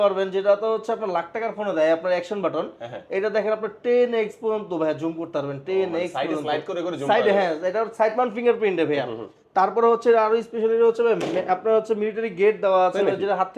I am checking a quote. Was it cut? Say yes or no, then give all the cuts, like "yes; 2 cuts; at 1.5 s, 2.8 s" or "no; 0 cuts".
no; 0 cuts